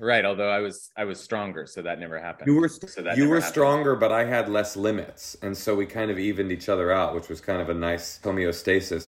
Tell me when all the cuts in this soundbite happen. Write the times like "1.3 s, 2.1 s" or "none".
8.2 s